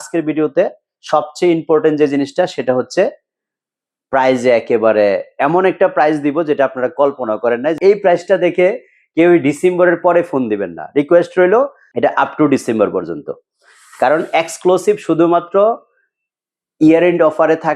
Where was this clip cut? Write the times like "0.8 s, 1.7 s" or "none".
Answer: 7.8 s, 11.8 s